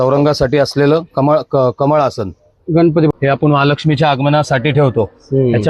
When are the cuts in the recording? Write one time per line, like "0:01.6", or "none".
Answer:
0:03.1